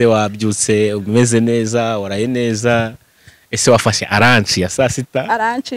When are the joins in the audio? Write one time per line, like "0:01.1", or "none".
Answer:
none